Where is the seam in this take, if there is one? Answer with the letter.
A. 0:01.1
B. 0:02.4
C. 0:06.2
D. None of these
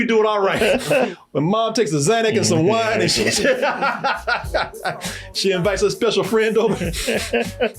A